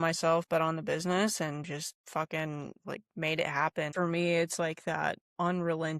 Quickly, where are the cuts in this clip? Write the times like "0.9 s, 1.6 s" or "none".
3.9 s